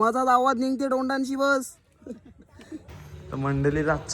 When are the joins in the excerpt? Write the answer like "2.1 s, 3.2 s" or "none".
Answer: 2.8 s